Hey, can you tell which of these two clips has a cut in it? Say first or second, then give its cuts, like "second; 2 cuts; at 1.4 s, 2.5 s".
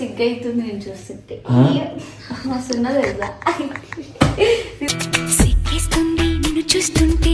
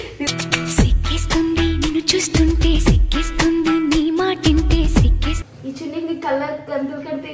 second; 1 cut; at 5.3 s